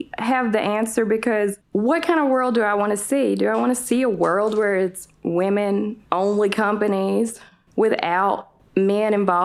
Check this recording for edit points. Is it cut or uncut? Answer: cut